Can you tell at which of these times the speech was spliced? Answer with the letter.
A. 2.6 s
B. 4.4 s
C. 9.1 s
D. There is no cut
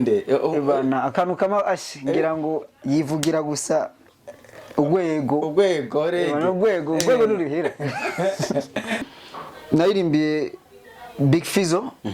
C